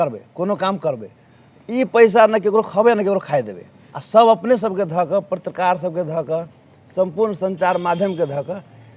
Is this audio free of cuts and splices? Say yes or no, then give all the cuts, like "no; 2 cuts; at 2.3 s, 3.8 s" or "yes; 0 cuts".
yes; 0 cuts